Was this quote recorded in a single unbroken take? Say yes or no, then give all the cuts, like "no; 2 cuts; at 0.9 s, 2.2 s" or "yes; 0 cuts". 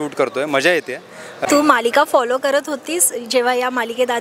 no; 1 cut; at 1.4 s